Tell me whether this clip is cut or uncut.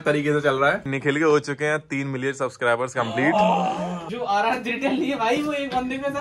cut